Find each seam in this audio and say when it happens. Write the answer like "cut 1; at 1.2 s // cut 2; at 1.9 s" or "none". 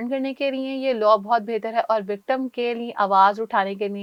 none